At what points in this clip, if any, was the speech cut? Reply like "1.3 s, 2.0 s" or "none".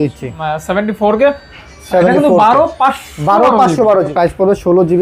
4.1 s

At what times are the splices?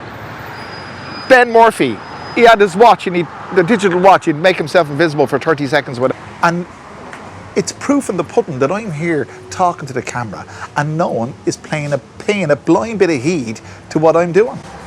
6.1 s

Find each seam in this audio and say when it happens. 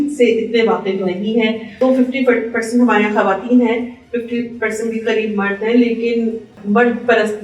1.8 s, 6.5 s

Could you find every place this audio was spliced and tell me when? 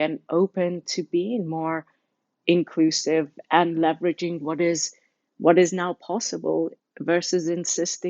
6.9 s

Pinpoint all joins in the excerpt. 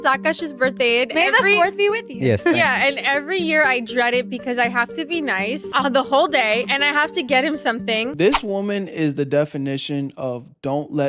5.7 s, 8.1 s

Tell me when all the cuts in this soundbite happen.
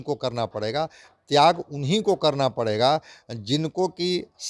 none

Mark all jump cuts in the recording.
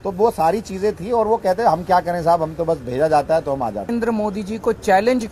3.9 s

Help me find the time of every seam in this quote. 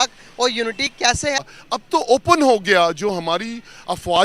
1.5 s

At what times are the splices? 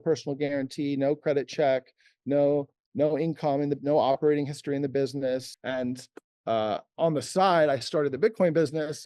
5.6 s

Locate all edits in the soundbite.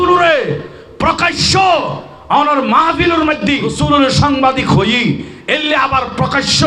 3.7 s

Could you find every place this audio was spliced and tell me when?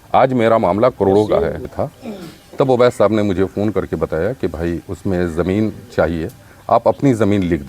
1.7 s

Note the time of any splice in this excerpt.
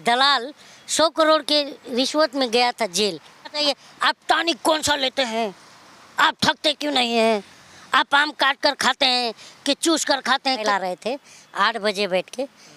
3.5 s, 10.6 s

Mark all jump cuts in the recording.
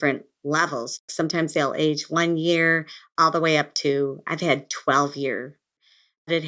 1.0 s, 5.7 s

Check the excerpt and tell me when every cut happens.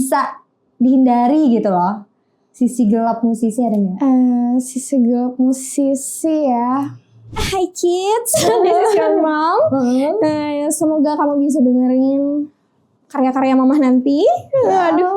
7.4 s

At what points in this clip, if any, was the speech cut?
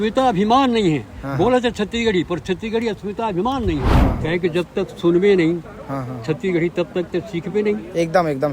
3.9 s

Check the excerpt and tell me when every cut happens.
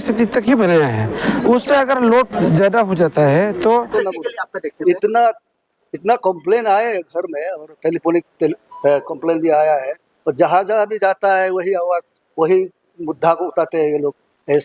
3.9 s

